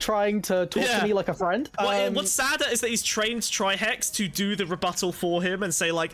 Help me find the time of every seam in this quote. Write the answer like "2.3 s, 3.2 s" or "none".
1.7 s